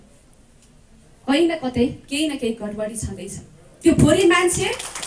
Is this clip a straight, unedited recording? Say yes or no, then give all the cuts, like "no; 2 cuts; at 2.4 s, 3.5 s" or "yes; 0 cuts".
no; 1 cut; at 3.6 s